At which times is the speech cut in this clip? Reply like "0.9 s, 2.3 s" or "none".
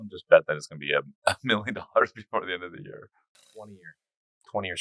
3.6 s